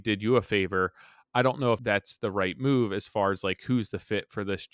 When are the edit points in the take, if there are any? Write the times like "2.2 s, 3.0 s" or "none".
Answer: 1.8 s